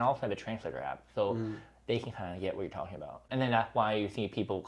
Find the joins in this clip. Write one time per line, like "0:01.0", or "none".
0:03.3